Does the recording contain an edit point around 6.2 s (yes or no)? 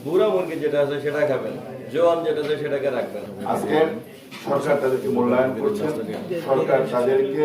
no